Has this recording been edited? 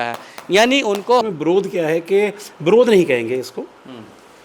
yes; 1 cut; at 1.2 s

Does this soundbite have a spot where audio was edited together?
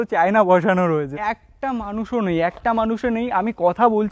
yes; 1 cut; at 1.1 s

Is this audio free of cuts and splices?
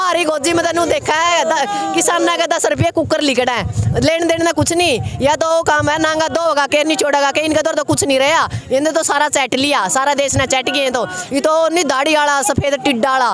yes; 0 cuts

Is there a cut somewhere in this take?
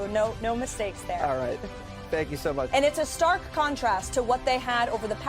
yes; 1 cut; at 2.7 s

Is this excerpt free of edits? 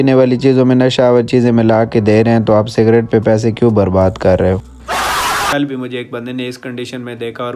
no; 1 cut; at 5.5 s

